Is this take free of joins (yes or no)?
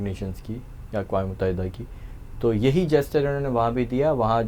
yes